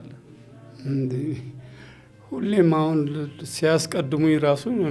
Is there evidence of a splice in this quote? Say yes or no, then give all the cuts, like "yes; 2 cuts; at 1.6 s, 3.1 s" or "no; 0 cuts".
no; 0 cuts